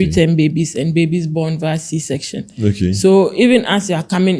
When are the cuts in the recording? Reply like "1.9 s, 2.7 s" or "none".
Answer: none